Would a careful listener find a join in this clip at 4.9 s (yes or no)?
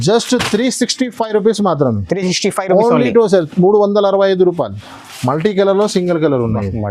yes